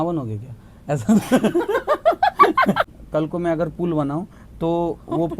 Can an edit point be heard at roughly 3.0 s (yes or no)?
yes